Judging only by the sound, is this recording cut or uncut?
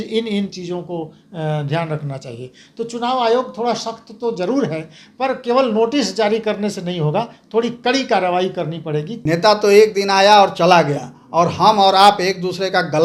cut